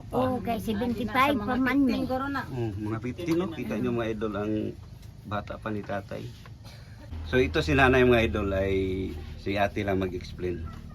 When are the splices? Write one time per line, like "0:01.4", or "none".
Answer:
0:07.1